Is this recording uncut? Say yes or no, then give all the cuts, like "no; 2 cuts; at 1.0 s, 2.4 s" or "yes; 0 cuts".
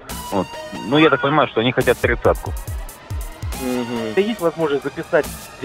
no; 1 cut; at 4.2 s